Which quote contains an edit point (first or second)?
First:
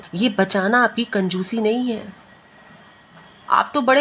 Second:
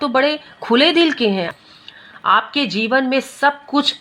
second